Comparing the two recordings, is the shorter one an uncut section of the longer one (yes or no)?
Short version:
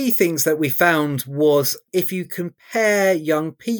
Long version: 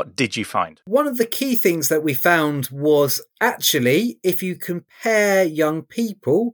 no